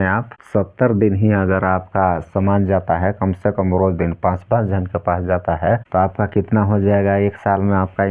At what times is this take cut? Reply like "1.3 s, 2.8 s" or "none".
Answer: none